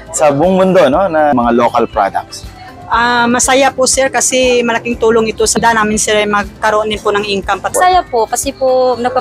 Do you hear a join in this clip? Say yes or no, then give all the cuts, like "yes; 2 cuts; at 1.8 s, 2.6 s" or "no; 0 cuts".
yes; 3 cuts; at 1.3 s, 5.6 s, 7.7 s